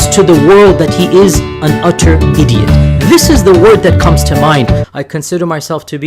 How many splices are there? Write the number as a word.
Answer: one